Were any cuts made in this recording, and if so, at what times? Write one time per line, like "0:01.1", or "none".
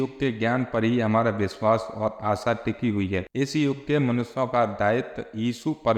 none